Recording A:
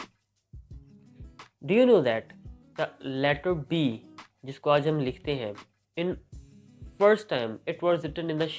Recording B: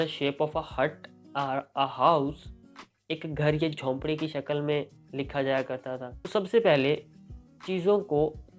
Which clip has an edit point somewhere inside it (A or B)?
B